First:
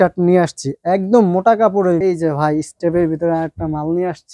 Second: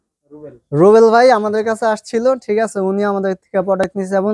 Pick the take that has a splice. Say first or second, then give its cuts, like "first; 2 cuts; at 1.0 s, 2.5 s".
first; 1 cut; at 2.0 s